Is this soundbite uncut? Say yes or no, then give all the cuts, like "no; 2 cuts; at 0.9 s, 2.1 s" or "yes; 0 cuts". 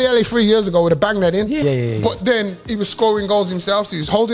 no; 1 cut; at 1.6 s